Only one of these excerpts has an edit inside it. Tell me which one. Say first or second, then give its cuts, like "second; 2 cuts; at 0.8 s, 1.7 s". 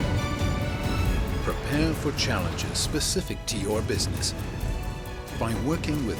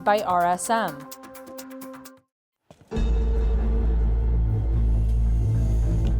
second; 2 cuts; at 0.9 s, 2.1 s